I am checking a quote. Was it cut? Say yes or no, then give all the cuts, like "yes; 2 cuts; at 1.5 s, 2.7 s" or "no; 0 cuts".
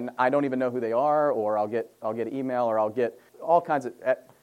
yes; 1 cut; at 3.3 s